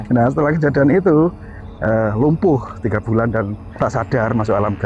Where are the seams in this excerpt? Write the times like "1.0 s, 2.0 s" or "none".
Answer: 3.6 s